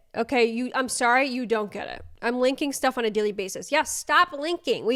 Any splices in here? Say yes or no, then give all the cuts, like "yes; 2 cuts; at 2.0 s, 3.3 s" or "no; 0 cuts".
no; 0 cuts